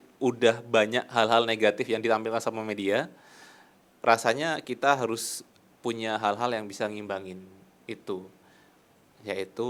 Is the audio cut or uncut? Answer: uncut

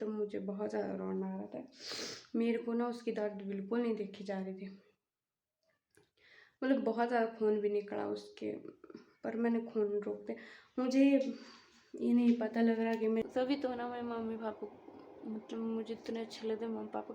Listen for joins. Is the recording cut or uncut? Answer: cut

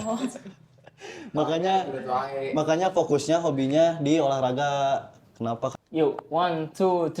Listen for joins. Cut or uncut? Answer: cut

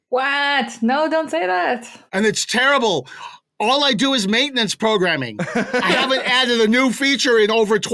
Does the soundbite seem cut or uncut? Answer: uncut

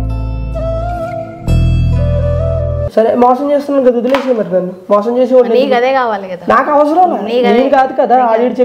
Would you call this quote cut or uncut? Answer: uncut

